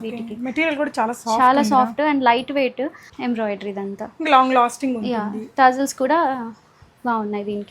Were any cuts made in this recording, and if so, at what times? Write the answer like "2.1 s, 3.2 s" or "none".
3.1 s